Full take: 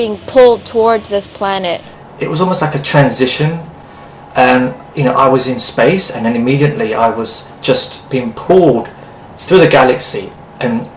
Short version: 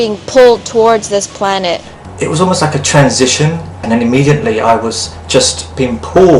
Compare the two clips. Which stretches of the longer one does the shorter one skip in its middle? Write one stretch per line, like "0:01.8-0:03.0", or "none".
0:03.8-0:06.1